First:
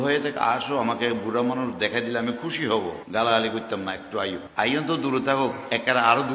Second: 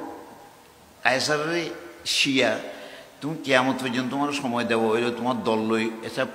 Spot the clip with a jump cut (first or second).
first